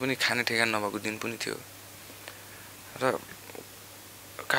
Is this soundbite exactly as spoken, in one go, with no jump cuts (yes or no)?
yes